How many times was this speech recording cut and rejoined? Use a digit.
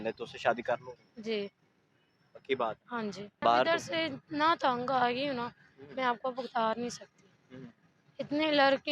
1